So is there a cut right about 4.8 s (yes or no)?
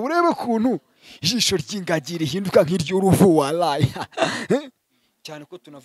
yes